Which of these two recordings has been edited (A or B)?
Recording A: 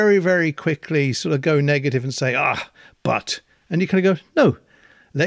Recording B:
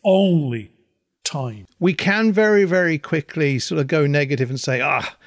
B